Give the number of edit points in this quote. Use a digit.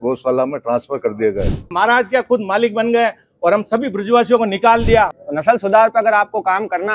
2